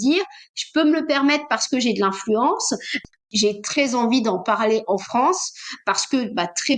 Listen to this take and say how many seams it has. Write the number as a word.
one